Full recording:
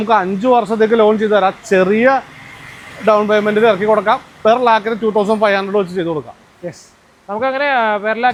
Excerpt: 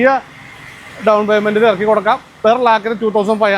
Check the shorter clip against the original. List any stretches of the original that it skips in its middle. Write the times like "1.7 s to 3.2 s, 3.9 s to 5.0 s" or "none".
none

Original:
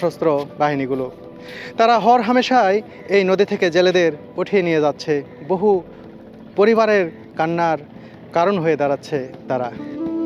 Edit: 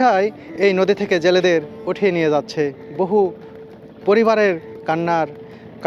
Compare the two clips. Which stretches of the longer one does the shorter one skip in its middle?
none

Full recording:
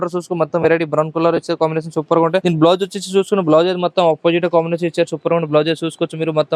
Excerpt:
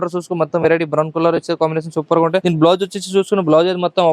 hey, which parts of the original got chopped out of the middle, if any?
none

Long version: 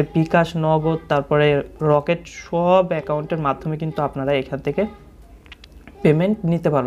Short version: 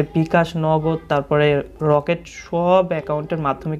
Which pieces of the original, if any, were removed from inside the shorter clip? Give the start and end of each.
none

